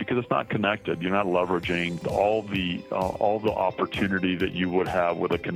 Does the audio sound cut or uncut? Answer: cut